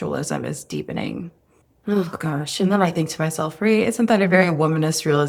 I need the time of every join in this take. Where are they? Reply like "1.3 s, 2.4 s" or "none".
none